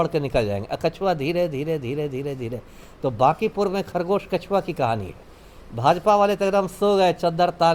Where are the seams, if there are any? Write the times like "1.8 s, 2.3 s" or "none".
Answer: none